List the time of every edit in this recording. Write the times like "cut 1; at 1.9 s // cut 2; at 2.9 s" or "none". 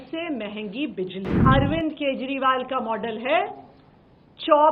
cut 1; at 1.3 s